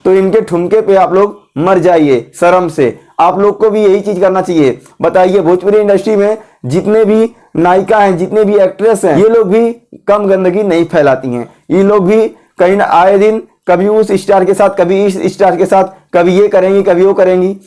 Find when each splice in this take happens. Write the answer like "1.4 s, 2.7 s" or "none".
none